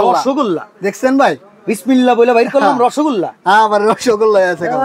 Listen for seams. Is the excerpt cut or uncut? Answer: uncut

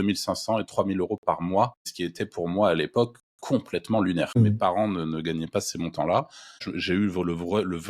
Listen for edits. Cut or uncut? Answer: cut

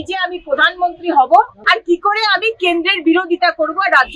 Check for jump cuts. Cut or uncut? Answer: cut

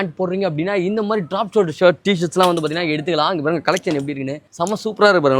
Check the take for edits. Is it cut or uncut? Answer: uncut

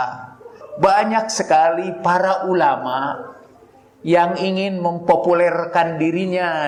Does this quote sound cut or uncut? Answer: uncut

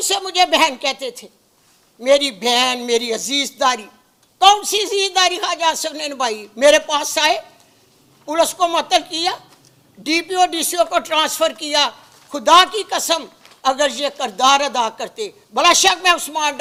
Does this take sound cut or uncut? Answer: uncut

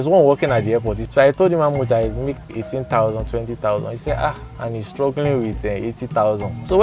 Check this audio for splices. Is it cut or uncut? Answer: uncut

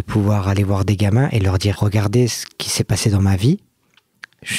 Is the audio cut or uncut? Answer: cut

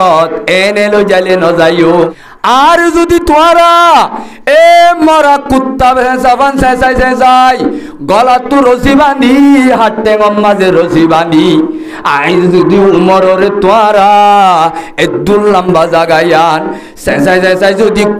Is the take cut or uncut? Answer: cut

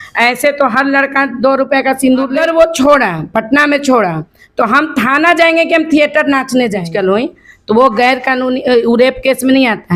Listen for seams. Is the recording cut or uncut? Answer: cut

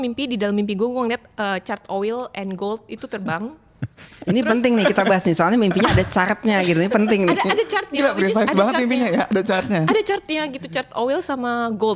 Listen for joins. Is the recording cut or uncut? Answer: uncut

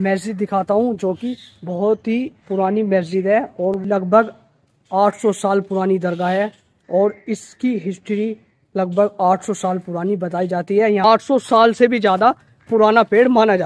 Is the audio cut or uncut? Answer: cut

